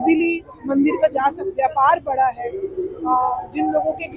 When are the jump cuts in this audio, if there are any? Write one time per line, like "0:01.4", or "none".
0:01.5